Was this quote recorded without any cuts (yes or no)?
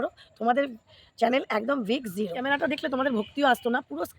no